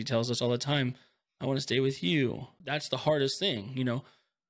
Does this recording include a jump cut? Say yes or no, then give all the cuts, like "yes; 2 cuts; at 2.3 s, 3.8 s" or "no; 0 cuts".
yes; 1 cut; at 2.5 s